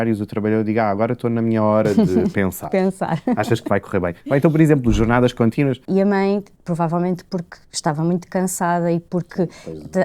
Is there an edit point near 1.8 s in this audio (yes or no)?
no